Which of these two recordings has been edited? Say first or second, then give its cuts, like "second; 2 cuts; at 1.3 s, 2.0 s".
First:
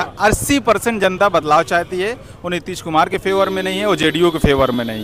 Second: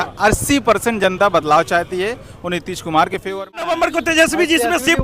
second; 1 cut; at 3.7 s